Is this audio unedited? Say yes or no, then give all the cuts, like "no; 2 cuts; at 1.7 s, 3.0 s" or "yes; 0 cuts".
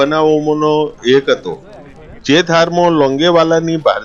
yes; 0 cuts